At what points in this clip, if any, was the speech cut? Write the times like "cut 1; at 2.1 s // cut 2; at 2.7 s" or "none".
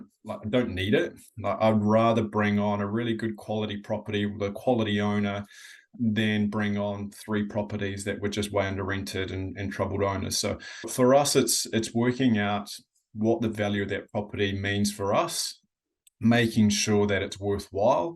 cut 1; at 5.9 s // cut 2; at 10.9 s